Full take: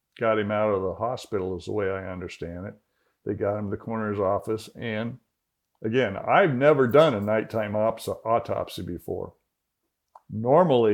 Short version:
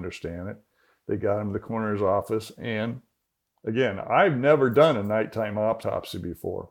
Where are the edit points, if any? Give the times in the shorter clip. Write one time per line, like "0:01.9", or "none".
0:05.8